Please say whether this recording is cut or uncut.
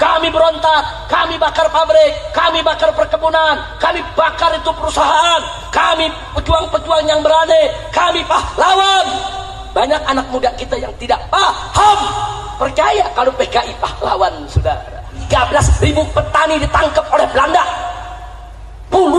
cut